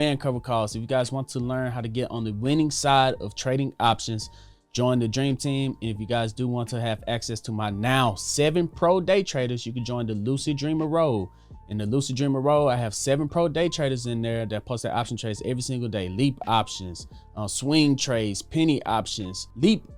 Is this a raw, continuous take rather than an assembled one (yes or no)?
yes